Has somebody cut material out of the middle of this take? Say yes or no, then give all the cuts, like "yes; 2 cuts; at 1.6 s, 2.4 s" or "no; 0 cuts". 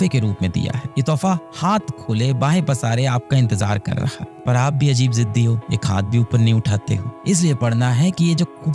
yes; 1 cut; at 7.1 s